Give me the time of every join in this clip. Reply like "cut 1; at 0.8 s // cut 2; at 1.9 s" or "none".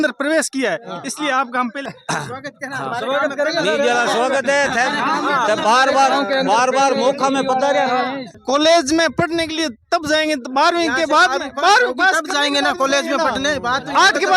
cut 1; at 1.8 s // cut 2; at 8.4 s